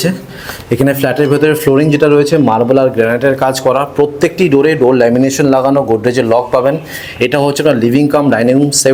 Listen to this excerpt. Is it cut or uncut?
uncut